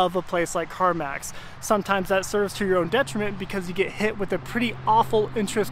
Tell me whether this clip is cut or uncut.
uncut